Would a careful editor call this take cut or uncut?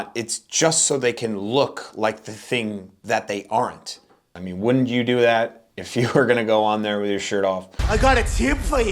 cut